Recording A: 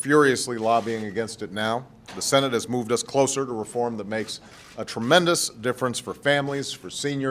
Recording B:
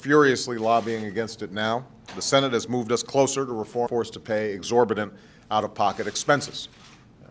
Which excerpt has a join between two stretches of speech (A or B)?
A